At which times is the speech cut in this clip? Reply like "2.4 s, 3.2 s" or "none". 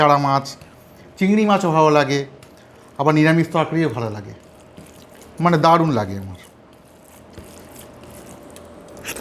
none